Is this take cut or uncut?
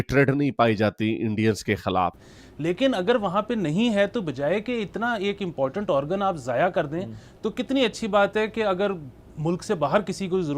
cut